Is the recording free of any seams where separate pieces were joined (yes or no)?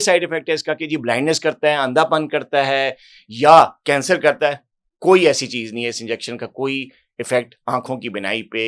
yes